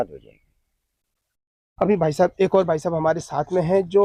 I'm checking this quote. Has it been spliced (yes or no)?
no